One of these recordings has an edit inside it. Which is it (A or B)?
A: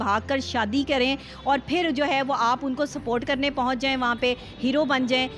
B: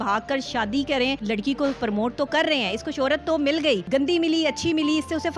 B